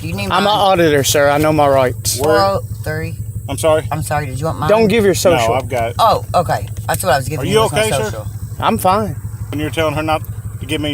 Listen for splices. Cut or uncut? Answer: cut